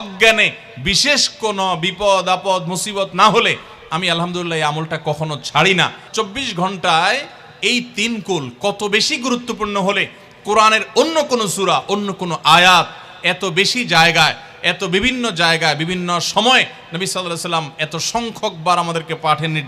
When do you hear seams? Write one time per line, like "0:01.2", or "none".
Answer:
0:06.1

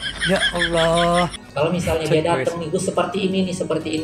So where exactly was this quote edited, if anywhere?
0:01.3

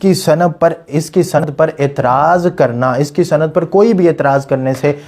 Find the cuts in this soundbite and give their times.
0:01.4

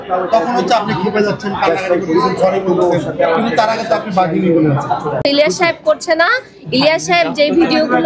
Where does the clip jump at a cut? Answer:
0:05.2

